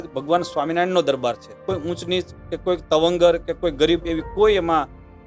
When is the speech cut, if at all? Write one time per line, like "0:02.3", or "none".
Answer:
0:01.6

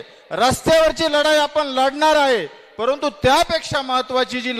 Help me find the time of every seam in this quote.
none

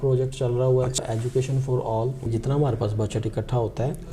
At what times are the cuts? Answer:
0:01.0
0:02.3

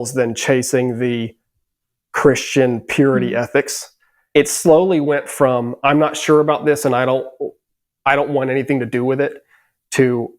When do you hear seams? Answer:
0:04.1

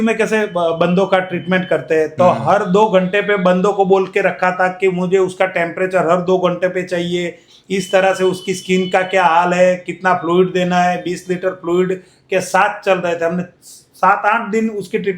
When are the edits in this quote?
none

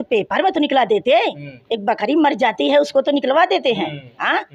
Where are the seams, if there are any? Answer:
none

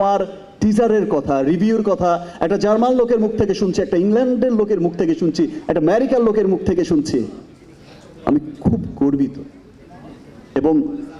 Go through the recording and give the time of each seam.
none

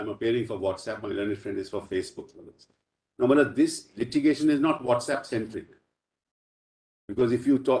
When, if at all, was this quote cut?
none

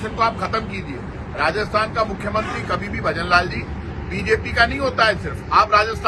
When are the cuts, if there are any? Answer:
none

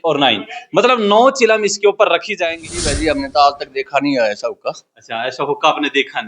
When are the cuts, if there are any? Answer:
0:02.8

